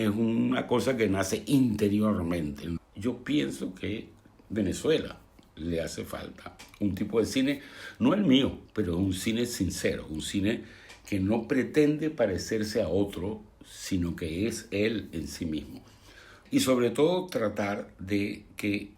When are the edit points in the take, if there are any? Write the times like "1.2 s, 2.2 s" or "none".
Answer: 2.7 s, 16.3 s